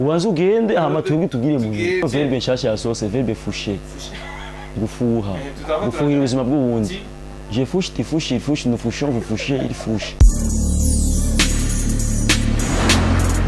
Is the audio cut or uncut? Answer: cut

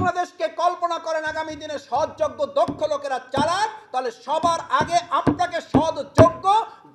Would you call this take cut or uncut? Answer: uncut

